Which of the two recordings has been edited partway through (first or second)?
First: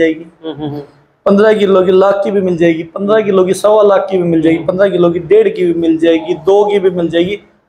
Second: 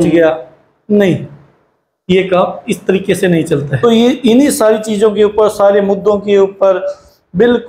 second